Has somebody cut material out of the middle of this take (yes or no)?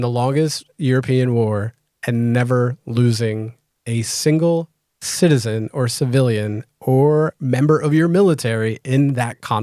no